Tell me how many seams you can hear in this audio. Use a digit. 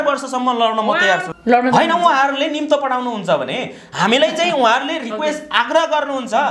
1